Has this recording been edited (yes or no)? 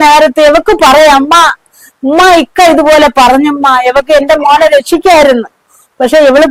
no